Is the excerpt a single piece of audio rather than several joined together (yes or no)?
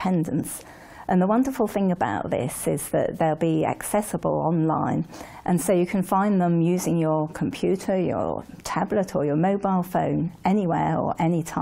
no